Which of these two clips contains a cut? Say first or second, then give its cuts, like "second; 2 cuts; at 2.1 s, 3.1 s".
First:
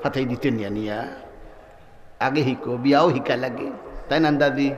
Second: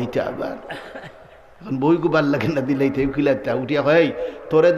first; 1 cut; at 2.2 s